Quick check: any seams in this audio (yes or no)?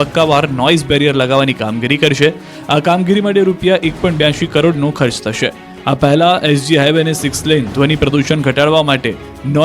yes